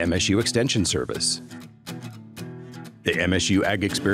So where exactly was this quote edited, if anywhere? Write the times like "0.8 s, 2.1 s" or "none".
none